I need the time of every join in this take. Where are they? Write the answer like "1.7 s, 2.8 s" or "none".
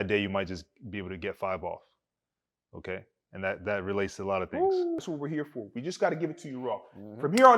5.0 s

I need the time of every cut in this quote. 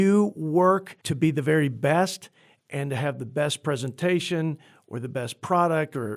1.0 s

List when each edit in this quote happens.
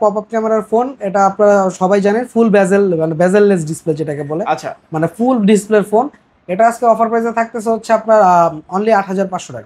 none

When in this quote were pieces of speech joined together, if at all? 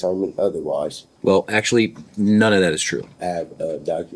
1.0 s, 3.1 s

